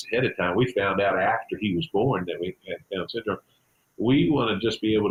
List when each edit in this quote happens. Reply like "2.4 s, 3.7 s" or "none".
none

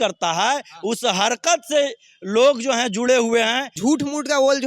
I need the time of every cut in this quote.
3.6 s

